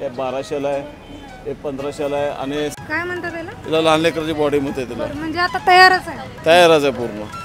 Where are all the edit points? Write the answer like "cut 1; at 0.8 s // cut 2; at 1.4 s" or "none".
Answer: cut 1; at 2.8 s

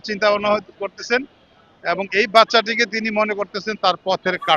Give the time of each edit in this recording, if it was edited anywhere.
none

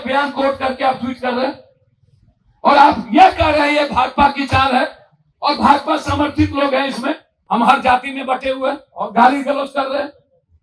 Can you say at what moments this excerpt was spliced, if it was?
cut 1; at 7.3 s

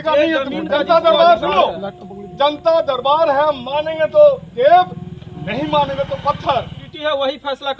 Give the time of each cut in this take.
cut 1; at 6.8 s

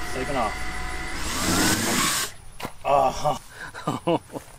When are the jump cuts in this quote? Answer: cut 1; at 3.4 s

